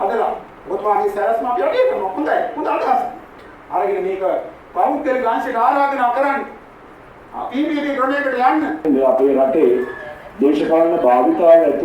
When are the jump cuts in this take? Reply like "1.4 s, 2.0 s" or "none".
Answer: 8.8 s